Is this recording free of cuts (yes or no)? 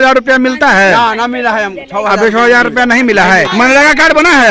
no